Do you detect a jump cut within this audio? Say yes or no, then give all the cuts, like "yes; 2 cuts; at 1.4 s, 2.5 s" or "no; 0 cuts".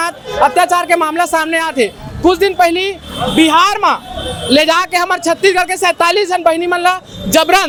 no; 0 cuts